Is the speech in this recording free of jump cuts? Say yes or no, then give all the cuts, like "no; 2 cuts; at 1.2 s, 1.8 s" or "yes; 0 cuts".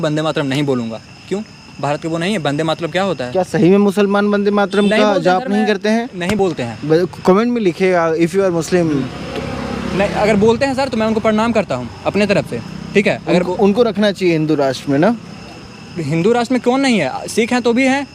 yes; 0 cuts